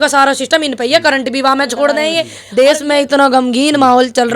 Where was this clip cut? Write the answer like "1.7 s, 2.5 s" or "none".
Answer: 2.3 s